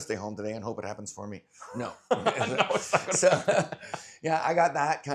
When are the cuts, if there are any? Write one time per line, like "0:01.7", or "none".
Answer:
none